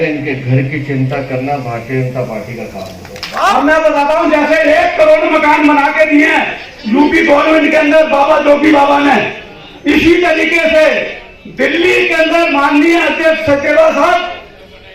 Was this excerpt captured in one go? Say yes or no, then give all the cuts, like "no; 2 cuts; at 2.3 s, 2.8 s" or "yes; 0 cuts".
no; 1 cut; at 3.4 s